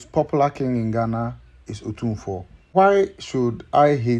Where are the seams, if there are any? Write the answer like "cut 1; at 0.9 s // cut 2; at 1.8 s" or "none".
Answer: cut 1; at 2.7 s